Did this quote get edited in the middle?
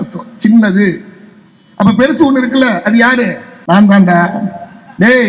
yes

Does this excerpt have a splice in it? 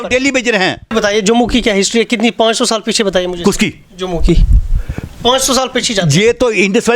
yes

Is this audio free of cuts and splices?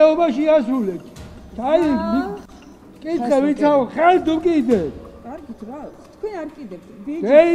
yes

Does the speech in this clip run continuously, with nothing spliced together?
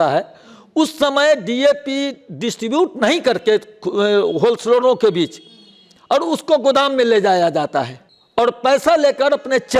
yes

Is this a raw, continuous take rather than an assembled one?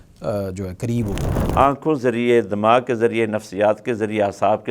no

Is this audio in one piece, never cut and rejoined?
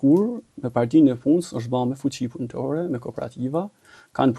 yes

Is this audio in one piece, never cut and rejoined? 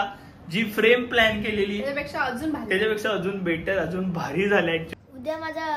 no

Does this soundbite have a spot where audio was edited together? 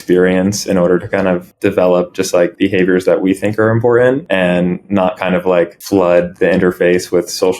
yes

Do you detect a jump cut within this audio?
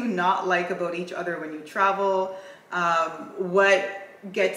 no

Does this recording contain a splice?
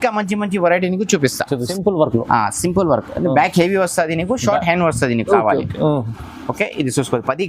yes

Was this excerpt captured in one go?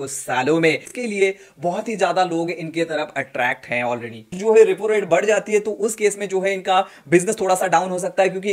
no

